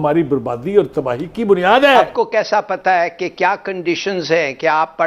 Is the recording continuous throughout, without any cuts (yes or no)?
no